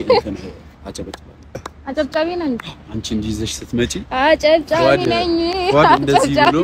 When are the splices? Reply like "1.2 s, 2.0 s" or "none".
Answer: none